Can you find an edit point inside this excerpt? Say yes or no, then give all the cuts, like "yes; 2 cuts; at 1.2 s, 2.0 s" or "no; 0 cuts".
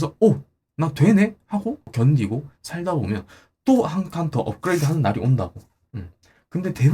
no; 0 cuts